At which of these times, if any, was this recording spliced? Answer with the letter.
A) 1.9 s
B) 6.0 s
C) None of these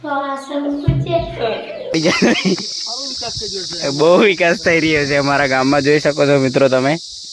A